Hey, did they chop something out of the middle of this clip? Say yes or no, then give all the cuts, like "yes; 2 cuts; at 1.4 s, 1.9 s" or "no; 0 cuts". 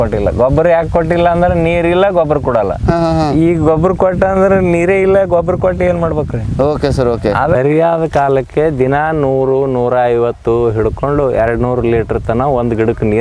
no; 0 cuts